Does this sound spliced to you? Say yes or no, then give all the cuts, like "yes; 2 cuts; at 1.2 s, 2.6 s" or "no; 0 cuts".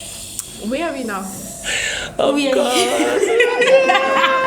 no; 0 cuts